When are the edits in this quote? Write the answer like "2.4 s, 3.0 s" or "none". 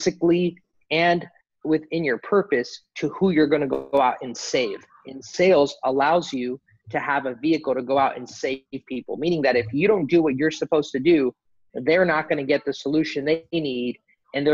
none